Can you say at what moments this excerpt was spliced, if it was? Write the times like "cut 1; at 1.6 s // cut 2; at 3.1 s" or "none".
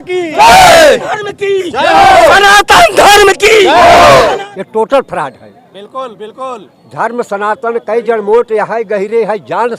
cut 1; at 4.4 s